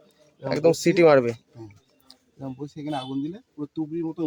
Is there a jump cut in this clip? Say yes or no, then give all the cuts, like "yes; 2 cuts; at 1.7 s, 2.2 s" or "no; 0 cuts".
no; 0 cuts